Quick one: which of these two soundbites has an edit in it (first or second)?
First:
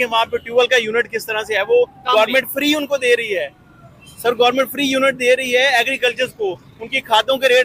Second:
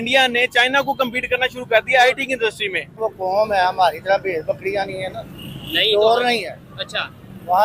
second